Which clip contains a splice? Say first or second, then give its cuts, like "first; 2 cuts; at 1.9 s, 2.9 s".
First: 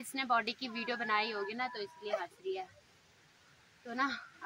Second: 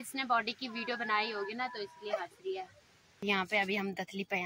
second; 1 cut; at 3.2 s